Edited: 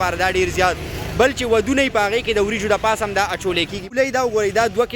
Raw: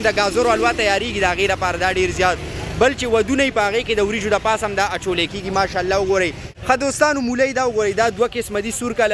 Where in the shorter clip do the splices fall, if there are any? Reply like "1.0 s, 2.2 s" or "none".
3.9 s